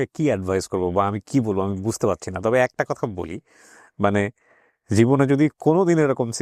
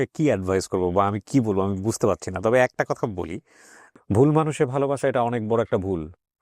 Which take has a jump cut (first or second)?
second